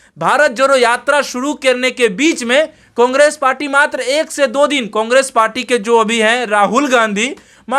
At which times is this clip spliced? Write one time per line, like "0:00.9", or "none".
none